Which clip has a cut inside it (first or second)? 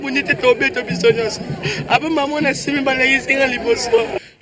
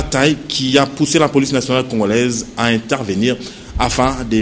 second